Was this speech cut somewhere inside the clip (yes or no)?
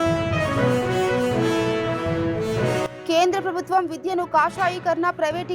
yes